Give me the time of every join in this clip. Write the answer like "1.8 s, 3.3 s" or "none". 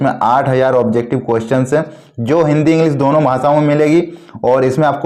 none

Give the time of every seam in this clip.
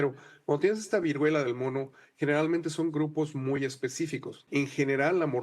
4.3 s

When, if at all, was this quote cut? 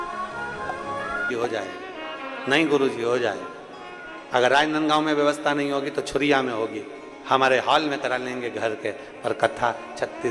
1.3 s

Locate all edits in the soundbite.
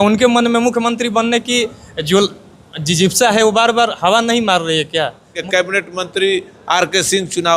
5.4 s

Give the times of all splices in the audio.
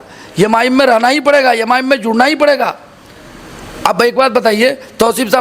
none

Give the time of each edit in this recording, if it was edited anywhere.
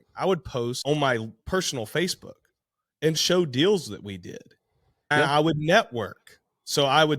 0.8 s, 3.2 s, 5.1 s

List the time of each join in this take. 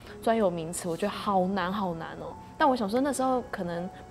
none

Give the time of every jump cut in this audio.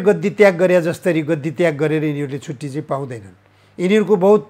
none

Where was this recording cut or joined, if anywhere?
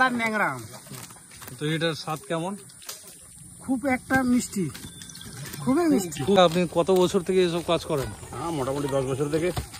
4.8 s, 6.4 s

